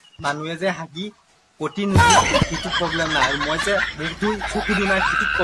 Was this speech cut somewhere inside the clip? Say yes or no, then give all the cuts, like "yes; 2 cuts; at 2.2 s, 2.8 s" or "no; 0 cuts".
no; 0 cuts